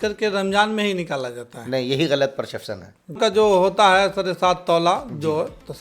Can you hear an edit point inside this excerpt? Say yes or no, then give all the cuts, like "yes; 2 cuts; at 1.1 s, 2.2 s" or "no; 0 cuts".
yes; 1 cut; at 3.2 s